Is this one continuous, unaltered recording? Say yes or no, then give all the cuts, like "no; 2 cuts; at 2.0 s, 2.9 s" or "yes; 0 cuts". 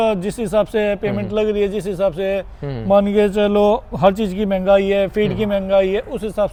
yes; 0 cuts